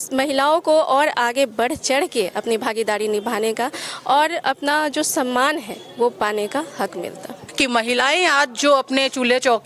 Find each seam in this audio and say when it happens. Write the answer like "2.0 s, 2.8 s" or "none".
7.4 s

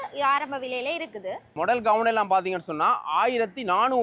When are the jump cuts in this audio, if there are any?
1.5 s

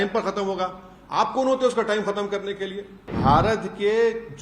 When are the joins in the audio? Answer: 3.1 s

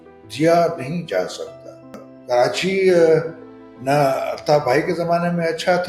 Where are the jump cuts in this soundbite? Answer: 2.1 s

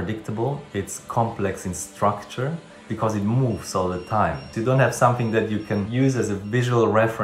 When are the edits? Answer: 2.9 s, 4.5 s

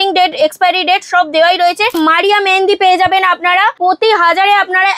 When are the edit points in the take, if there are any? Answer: 2.0 s, 3.8 s

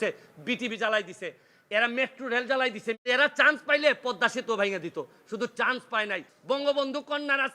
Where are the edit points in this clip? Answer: 3.0 s, 6.3 s

